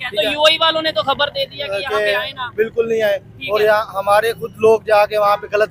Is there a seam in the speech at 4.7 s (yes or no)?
no